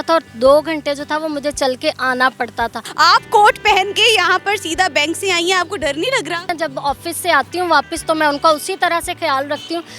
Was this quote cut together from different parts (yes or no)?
yes